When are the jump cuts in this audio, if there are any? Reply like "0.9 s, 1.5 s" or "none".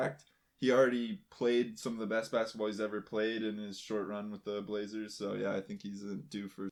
none